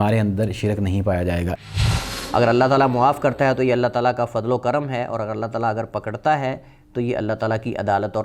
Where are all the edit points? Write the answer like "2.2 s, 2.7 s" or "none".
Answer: 1.6 s